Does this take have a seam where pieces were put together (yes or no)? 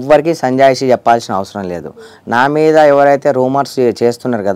no